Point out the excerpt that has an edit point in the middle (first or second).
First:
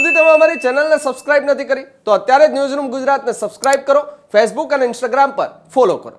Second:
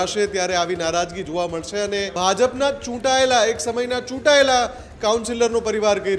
second